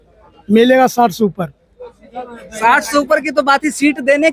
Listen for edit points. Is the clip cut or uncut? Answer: uncut